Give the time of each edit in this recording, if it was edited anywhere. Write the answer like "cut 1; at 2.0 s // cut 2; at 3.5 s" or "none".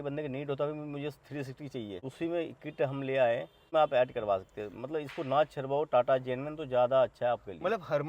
cut 1; at 2.0 s // cut 2; at 3.7 s